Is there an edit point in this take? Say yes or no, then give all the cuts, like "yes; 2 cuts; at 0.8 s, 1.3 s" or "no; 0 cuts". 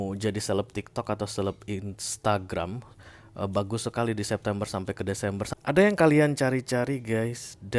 yes; 1 cut; at 5.4 s